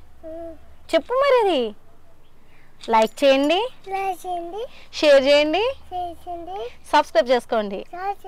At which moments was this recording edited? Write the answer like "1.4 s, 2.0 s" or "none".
none